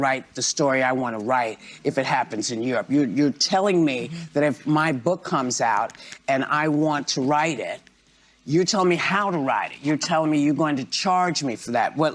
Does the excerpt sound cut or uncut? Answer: uncut